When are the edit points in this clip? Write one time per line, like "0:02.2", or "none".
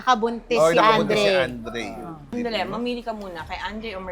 0:02.2